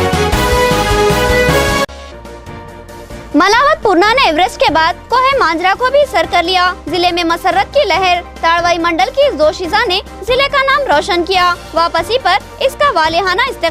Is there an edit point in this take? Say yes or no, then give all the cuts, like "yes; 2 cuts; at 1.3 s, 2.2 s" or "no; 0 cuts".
no; 0 cuts